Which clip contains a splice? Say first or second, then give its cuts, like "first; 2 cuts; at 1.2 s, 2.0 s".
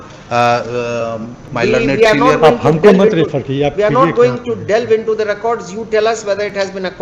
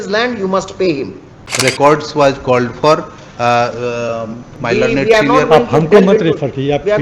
second; 1 cut; at 1.4 s